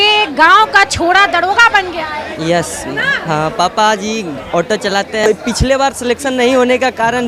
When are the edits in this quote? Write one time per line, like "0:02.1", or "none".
0:05.3